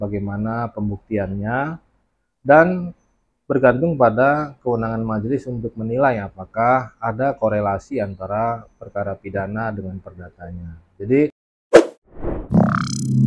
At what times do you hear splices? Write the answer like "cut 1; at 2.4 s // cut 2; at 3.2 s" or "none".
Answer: cut 1; at 11.5 s